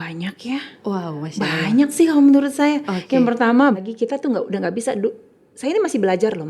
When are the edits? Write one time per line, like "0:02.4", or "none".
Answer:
0:03.8